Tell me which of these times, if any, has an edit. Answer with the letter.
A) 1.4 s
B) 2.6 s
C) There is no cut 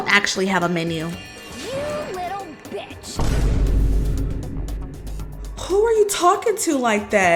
C